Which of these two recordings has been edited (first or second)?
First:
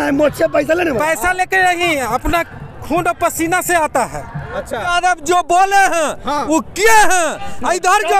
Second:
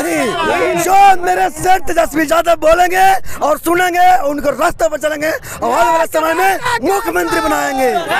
first